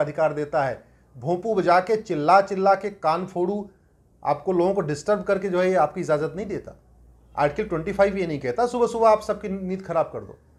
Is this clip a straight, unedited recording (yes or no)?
yes